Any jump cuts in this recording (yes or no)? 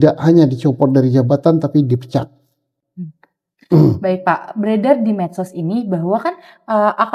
no